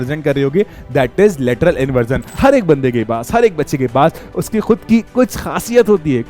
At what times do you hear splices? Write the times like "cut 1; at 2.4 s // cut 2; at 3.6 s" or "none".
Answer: cut 1; at 2.2 s